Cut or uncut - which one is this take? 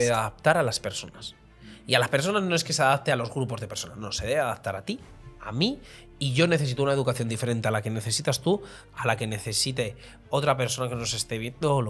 uncut